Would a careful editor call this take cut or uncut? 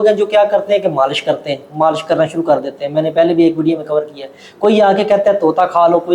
uncut